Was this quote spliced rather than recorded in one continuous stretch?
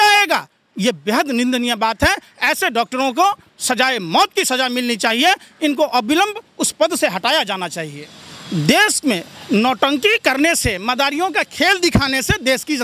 yes; 1 cut; at 7.9 s

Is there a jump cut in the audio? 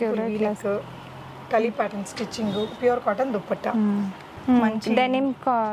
yes; 1 cut; at 4.3 s

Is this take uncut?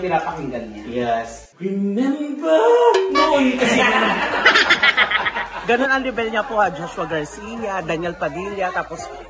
no; 1 cut; at 5.6 s

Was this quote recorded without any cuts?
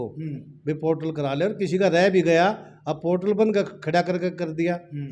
yes; 0 cuts

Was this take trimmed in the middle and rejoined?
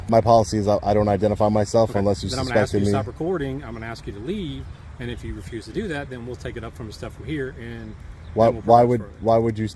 no; 0 cuts

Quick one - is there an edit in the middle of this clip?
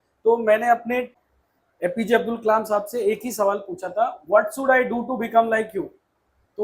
yes; 1 cut; at 1.2 s

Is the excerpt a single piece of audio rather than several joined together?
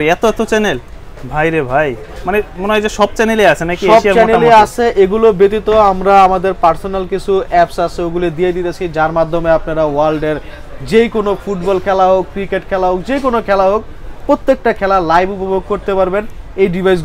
yes; 0 cuts

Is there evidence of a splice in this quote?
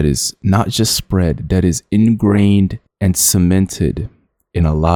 no; 0 cuts

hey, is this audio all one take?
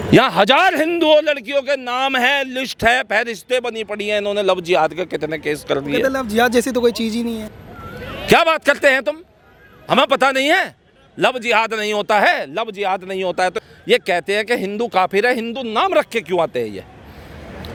yes; 0 cuts

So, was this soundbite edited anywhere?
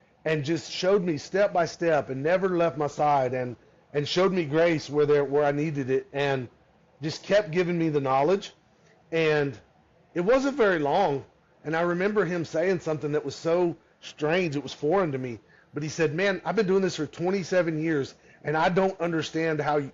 no; 0 cuts

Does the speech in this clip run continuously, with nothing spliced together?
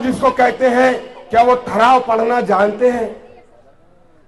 yes; 0 cuts

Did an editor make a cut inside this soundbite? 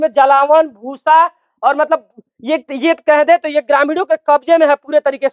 no; 0 cuts

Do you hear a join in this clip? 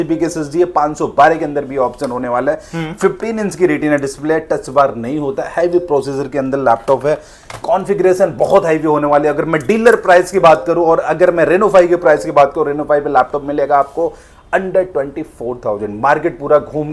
no; 0 cuts

